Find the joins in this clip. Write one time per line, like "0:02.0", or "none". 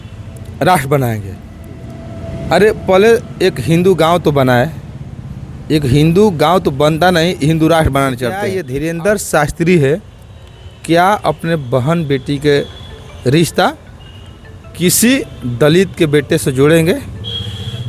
0:08.5